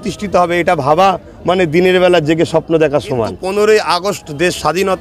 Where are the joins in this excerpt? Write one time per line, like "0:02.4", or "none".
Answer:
0:03.4